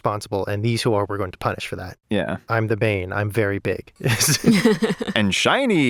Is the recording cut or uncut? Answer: uncut